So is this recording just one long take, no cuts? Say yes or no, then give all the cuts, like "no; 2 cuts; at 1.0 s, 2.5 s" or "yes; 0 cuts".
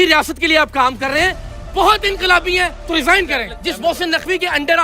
no; 1 cut; at 3.5 s